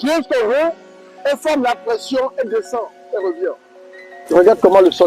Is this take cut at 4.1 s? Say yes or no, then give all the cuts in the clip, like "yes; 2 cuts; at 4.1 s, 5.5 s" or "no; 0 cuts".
yes; 1 cut; at 4.1 s